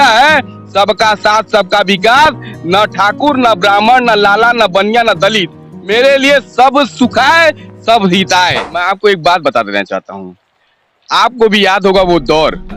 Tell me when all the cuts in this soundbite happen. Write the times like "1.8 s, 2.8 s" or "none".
8.7 s